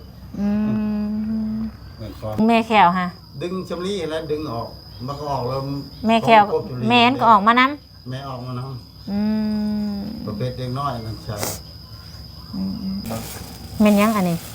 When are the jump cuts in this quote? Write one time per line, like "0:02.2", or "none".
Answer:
0:02.4
0:13.0